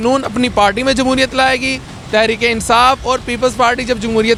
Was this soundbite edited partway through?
no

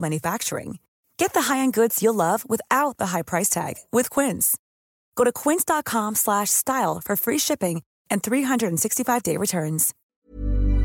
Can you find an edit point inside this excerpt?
yes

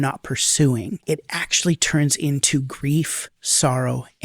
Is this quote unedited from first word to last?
no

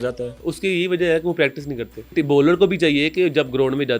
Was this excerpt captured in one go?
no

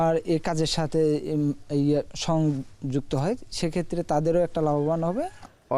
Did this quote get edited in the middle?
no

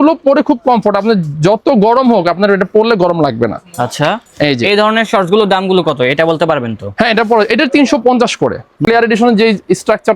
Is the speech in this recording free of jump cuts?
no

